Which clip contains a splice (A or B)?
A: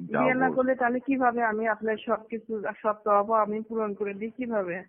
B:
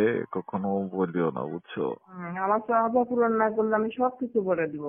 B